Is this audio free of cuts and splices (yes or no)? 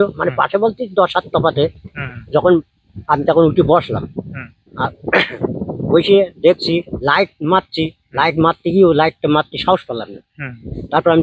no